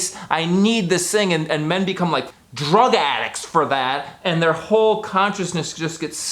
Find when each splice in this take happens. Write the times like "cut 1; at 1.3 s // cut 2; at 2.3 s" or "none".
cut 1; at 2.3 s